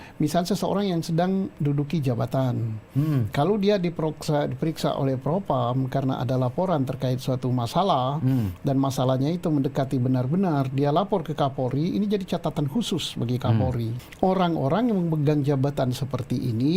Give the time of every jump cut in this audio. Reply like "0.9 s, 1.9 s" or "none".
14.0 s